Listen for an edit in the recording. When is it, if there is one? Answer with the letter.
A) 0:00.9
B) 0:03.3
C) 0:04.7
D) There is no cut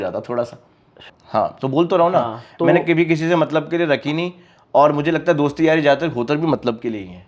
A